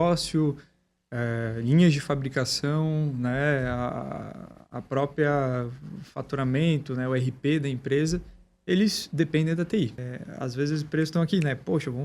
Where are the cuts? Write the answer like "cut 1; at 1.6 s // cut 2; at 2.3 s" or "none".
cut 1; at 10.0 s